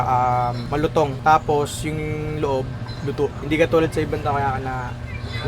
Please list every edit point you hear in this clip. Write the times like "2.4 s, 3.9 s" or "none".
1.2 s